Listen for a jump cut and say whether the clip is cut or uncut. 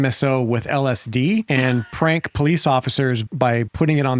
cut